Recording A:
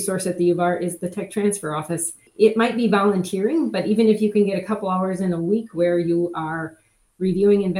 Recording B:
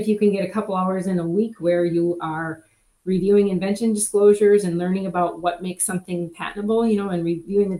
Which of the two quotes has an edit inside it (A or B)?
A